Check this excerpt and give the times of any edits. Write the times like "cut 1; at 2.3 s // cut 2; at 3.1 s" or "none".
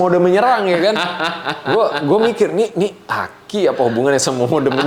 none